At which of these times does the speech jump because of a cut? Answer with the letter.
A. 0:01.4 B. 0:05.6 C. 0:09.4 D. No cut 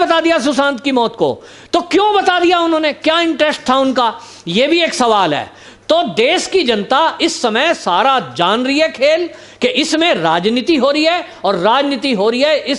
D